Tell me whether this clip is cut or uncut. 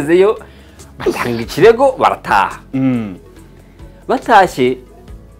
uncut